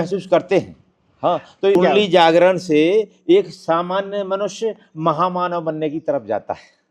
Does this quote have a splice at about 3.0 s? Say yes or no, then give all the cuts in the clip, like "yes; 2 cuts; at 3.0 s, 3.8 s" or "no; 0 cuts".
no; 1 cut; at 1.8 s